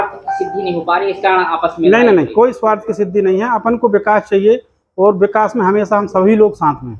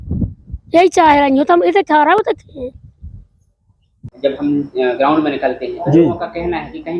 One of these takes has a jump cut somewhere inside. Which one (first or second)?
second